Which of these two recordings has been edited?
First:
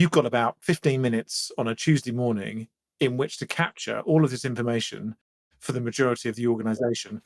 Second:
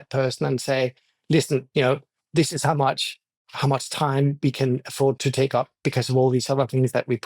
second; 3 cuts; at 2.2 s, 3.5 s, 5.2 s

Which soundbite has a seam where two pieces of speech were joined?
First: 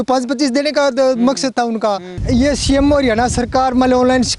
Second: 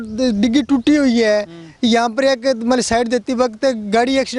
first; 1 cut; at 2.2 s

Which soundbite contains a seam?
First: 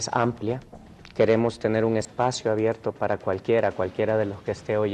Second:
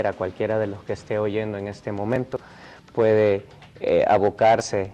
second; 1 cut; at 4.0 s

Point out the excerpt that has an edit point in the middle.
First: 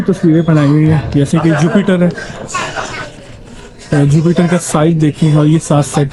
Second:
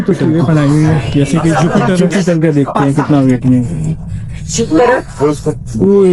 second; 1 cut; at 2.0 s

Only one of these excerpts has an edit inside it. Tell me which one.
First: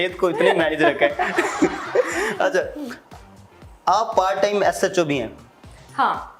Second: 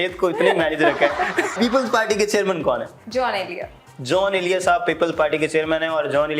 second; 2 cuts; at 1.5 s, 3.0 s

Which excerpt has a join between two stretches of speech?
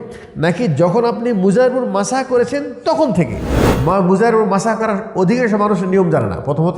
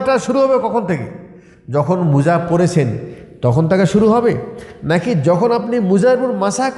first; 1 cut; at 3.4 s

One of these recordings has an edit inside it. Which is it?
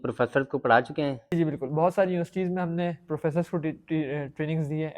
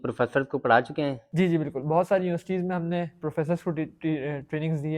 first; 1 cut; at 1.3 s

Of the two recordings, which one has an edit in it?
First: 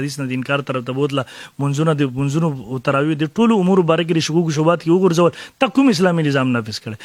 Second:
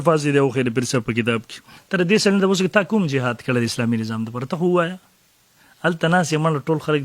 second; 1 cut; at 1.8 s

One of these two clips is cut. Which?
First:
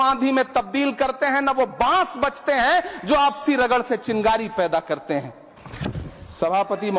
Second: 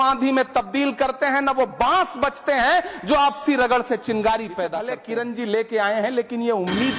second; 1 cut; at 4.8 s

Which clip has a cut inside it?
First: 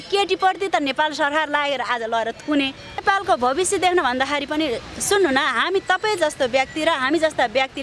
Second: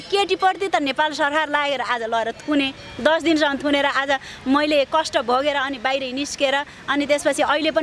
first; 1 cut; at 3.0 s

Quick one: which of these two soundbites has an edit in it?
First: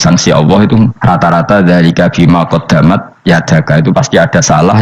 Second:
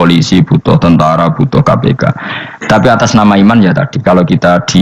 first; 1 cut; at 1.0 s

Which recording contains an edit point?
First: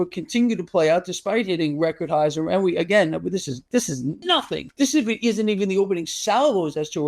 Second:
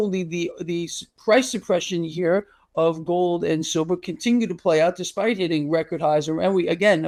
first; 1 cut; at 4.5 s

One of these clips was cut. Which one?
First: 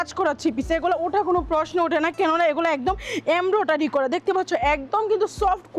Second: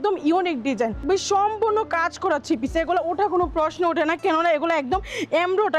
second; 1 cut; at 1.0 s

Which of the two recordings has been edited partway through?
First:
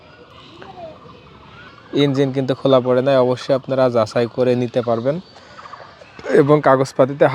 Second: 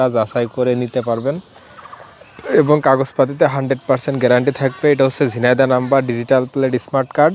first; 1 cut; at 1.7 s

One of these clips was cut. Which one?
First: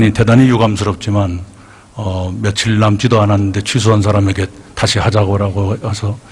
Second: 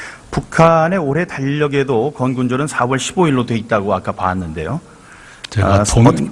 first; 1 cut; at 4.5 s

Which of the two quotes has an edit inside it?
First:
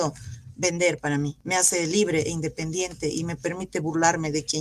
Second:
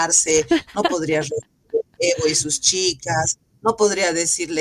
first; 1 cut; at 1.4 s

